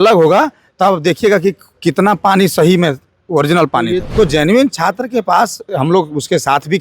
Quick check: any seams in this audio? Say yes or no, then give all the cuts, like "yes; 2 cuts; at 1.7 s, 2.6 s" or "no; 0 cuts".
yes; 1 cut; at 4.1 s